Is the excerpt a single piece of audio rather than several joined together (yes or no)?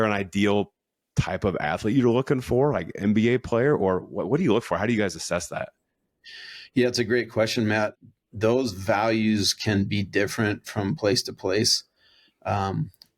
no